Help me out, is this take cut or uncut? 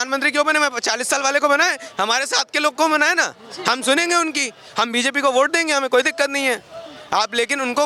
uncut